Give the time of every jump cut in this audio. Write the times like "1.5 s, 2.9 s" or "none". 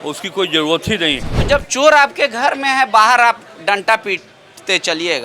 1.4 s